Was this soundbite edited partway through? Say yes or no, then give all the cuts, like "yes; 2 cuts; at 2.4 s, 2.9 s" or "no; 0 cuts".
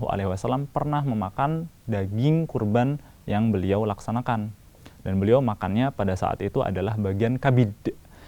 no; 0 cuts